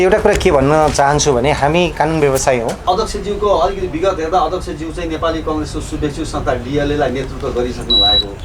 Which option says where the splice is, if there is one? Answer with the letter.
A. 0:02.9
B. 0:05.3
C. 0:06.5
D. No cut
A